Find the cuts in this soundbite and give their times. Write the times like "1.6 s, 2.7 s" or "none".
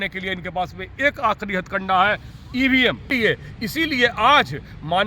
3.1 s